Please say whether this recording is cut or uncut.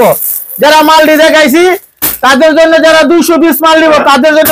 uncut